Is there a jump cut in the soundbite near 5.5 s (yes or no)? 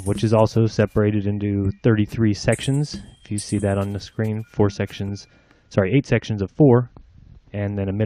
yes